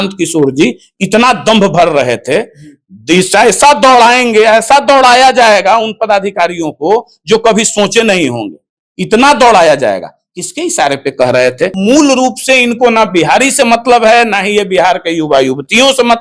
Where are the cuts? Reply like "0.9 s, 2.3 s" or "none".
11.8 s